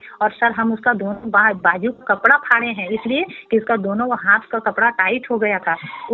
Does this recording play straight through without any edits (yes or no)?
yes